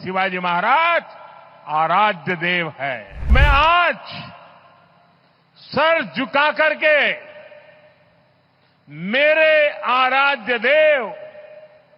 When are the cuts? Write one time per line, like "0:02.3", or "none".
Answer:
0:03.3